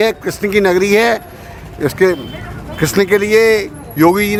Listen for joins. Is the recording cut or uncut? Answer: uncut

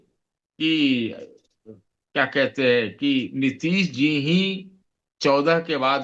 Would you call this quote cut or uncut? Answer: uncut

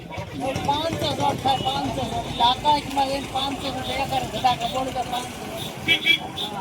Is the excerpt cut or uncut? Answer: uncut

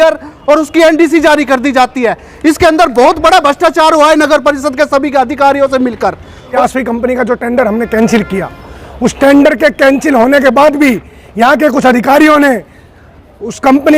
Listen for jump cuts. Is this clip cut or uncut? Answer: cut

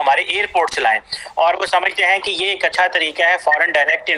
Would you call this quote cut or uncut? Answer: uncut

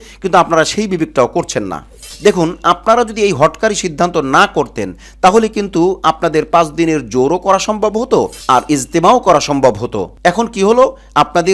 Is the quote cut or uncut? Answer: cut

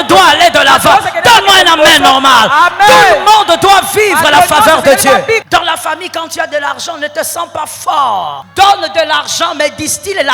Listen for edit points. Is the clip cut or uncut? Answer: cut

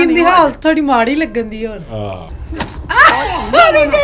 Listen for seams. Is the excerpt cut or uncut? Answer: cut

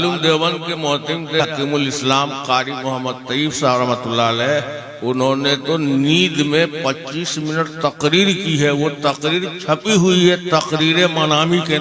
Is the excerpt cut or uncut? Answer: cut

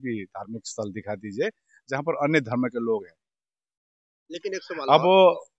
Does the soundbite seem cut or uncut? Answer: uncut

